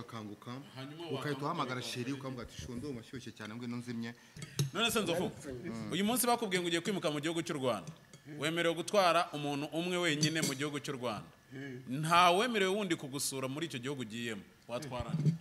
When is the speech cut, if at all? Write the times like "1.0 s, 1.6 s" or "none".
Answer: 4.4 s